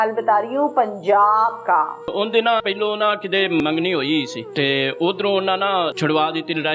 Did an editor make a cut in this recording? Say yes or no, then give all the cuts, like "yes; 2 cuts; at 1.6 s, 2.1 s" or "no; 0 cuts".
yes; 4 cuts; at 2.1 s, 3.6 s, 4.4 s, 5.9 s